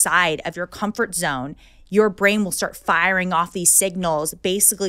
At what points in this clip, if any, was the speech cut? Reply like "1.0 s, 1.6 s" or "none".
none